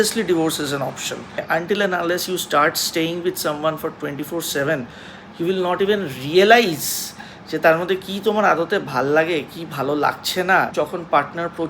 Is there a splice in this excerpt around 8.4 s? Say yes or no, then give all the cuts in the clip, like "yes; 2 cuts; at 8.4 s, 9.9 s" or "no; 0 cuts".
no; 2 cuts; at 1.4 s, 10.7 s